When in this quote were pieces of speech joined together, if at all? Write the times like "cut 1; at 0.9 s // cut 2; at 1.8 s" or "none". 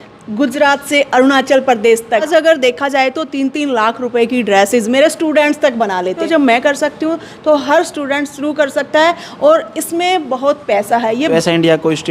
cut 1; at 2.3 s // cut 2; at 6.2 s // cut 3; at 11.3 s

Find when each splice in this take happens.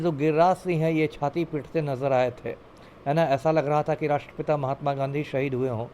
none

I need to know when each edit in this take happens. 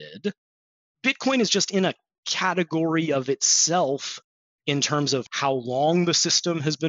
cut 1; at 4.4 s // cut 2; at 5.3 s

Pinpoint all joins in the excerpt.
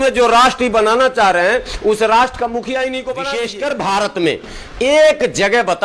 cut 1; at 3.2 s

